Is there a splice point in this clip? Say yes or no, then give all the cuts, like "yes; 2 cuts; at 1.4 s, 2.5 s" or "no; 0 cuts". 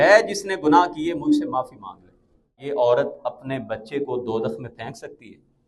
yes; 1 cut; at 2.7 s